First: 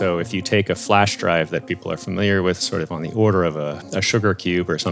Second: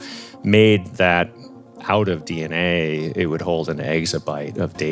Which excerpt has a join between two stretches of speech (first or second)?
first